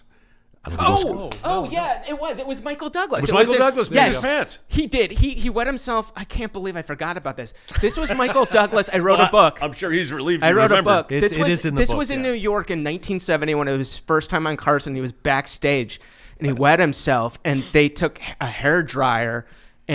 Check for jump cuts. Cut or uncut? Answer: uncut